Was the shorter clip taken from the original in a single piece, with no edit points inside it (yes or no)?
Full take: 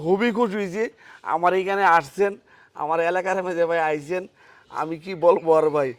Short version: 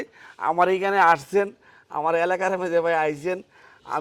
yes